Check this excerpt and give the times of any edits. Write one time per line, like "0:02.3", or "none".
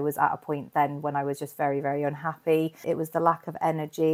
0:02.8